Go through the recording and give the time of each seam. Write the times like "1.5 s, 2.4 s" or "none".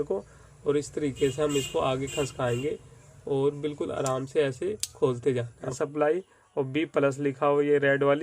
5.7 s